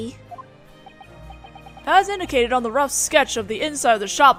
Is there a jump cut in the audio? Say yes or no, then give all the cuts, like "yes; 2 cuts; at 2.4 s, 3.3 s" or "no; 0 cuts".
no; 0 cuts